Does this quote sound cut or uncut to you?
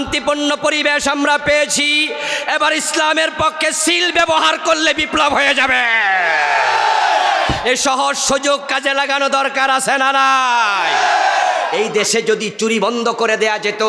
cut